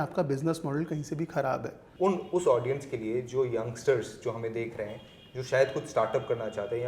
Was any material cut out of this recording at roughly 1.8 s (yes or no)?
yes